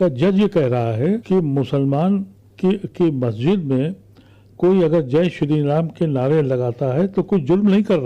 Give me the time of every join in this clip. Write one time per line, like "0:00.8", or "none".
0:01.2
0:02.4